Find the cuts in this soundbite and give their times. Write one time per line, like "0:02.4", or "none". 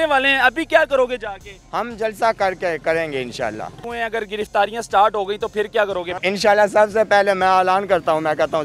0:03.9
0:06.1